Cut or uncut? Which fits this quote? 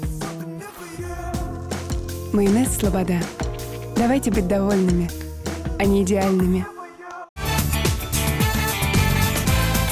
cut